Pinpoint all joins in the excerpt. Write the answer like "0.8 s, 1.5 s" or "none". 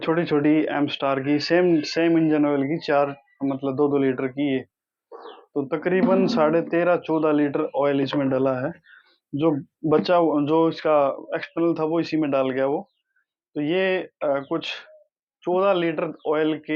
none